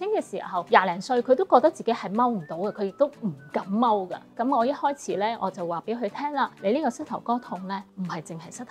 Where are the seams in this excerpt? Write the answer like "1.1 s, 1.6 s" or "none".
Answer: 4.3 s, 6.5 s, 7.9 s

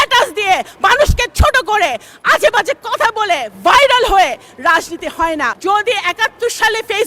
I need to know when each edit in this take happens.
5.6 s

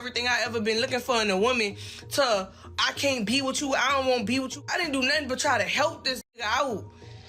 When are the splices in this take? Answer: 4.6 s

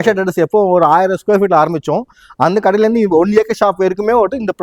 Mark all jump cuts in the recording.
none

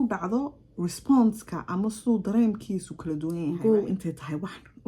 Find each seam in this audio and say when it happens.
3.6 s

